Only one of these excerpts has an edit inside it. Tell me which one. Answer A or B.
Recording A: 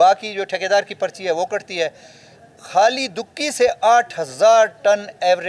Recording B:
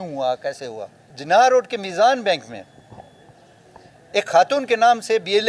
B